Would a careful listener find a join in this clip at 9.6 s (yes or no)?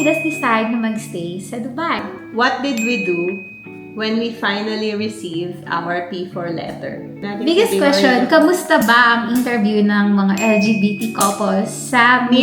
no